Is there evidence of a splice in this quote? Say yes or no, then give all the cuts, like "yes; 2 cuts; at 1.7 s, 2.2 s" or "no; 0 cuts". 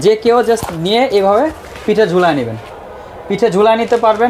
no; 0 cuts